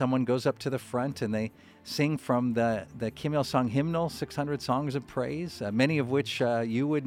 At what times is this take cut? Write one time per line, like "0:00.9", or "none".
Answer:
none